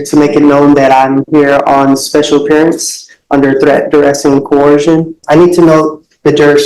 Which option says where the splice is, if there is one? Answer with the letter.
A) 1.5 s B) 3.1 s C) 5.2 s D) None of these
C